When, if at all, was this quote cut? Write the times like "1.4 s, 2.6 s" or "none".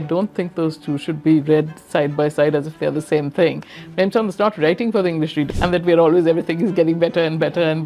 5.5 s